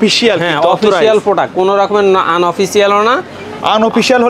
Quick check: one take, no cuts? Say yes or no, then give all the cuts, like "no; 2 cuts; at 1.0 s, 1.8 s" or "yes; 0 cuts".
yes; 0 cuts